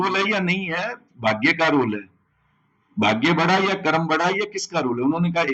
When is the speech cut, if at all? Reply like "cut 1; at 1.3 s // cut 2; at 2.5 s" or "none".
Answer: none